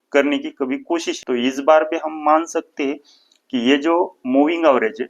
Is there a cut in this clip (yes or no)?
yes